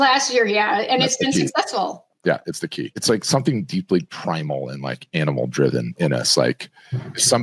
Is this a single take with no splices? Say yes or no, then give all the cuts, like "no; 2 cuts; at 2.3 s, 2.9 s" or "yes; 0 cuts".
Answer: no; 1 cut; at 3.0 s